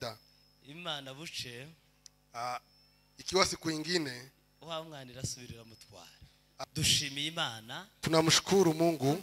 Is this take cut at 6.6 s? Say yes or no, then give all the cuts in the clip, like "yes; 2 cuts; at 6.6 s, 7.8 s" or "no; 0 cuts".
yes; 1 cut; at 6.6 s